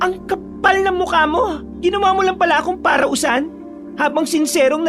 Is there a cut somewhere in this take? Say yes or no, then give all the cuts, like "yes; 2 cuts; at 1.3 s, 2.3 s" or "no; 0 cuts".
yes; 1 cut; at 1.6 s